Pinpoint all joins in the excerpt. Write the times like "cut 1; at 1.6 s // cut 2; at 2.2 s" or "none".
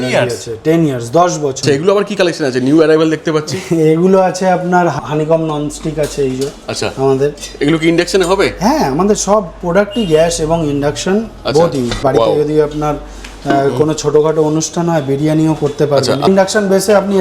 cut 1; at 1.6 s // cut 2; at 5.0 s // cut 3; at 12.0 s // cut 4; at 16.3 s